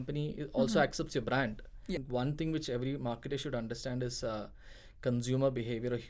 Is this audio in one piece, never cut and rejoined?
no; 1 cut; at 2.0 s

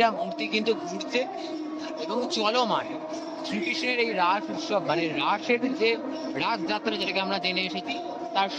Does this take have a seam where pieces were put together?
no; 0 cuts

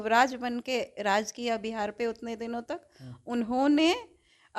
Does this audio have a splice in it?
no; 0 cuts

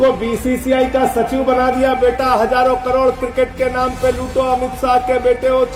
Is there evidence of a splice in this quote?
no; 0 cuts

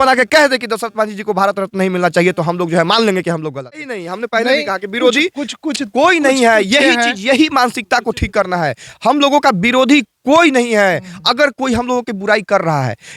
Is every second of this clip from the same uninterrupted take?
no; 1 cut; at 4.0 s

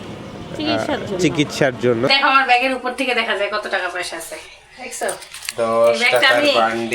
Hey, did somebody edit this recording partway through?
yes; 1 cut; at 2.1 s

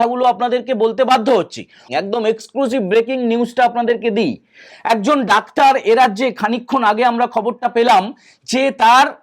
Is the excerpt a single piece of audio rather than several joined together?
no; 1 cut; at 1.8 s

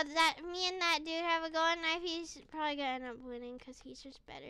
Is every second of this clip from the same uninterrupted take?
yes; 0 cuts

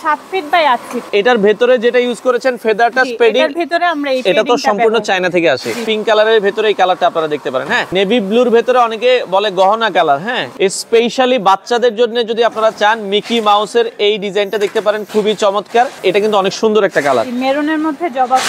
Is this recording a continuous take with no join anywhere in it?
no; 5 cuts; at 1.1 s, 5.9 s, 7.9 s, 10.4 s, 16.0 s

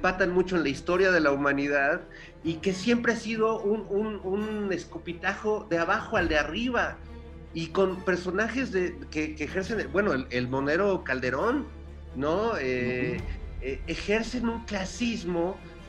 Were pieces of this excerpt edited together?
no; 0 cuts

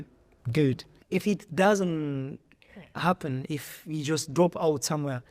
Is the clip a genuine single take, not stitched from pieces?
no; 1 cut; at 0.9 s

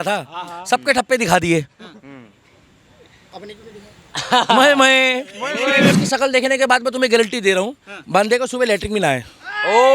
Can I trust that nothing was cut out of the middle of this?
no; 1 cut; at 5.9 s

